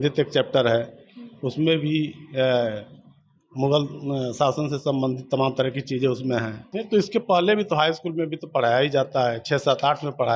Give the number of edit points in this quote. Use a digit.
1